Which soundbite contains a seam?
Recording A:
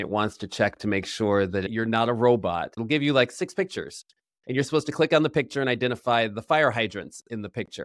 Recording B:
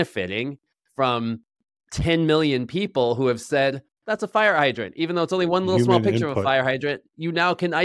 A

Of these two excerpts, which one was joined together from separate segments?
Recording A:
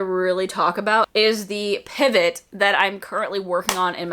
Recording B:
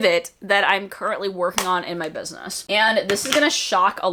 A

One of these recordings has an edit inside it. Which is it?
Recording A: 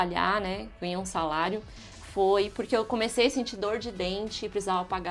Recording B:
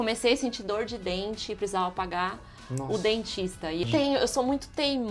B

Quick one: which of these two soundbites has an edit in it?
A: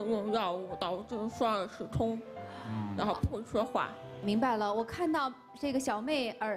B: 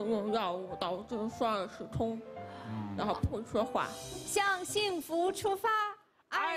B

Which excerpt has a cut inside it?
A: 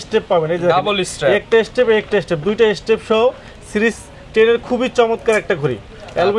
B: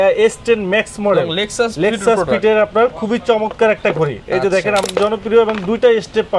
B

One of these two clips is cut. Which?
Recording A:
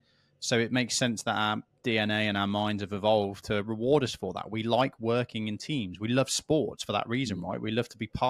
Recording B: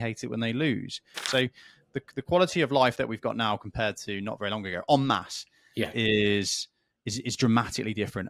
B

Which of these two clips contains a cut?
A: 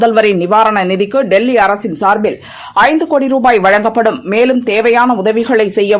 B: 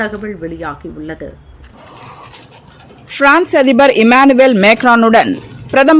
B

